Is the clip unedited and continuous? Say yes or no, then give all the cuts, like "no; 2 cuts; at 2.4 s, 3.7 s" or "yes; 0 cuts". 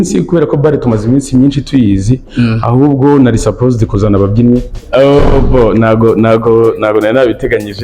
no; 1 cut; at 4.7 s